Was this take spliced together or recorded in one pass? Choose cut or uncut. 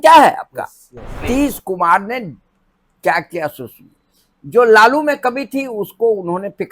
cut